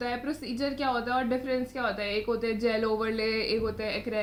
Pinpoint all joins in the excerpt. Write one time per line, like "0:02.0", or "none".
none